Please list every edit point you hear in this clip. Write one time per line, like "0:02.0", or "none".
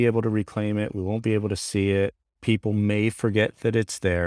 0:02.3